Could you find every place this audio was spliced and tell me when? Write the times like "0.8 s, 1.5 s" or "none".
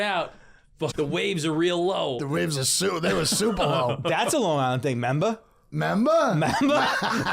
0.9 s